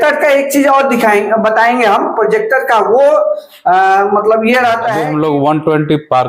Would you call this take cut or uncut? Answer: cut